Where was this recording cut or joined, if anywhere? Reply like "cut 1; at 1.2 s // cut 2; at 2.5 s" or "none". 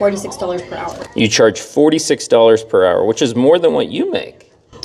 none

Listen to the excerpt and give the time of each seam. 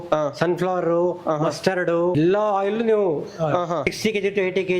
cut 1; at 2.1 s // cut 2; at 3.9 s

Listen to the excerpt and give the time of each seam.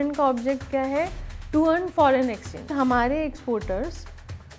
cut 1; at 2.7 s

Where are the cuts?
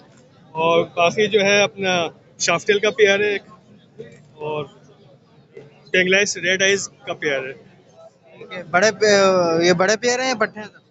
none

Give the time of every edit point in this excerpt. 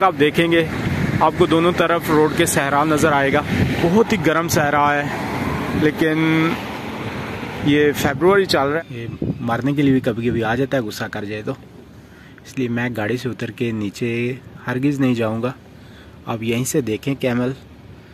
cut 1; at 3.8 s // cut 2; at 8.8 s

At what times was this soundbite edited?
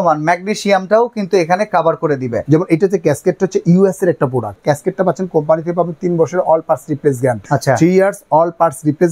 cut 1; at 2.4 s // cut 2; at 4.6 s // cut 3; at 7.4 s

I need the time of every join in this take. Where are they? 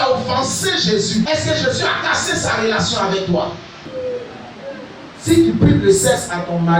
cut 1; at 1.2 s // cut 2; at 3.9 s

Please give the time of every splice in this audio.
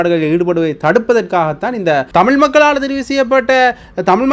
cut 1; at 2.1 s

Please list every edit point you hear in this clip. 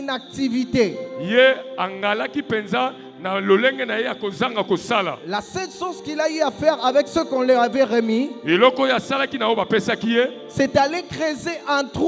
none

